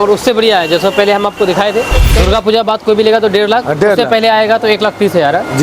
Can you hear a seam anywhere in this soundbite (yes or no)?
yes